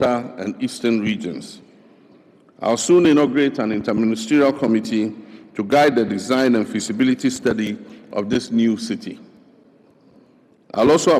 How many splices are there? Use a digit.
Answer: 0